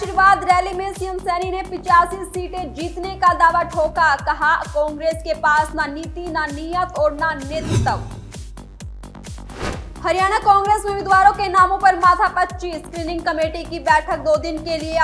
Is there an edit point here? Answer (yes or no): yes